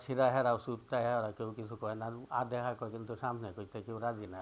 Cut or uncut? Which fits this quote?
uncut